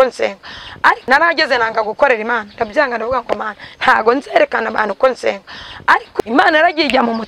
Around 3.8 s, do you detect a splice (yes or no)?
no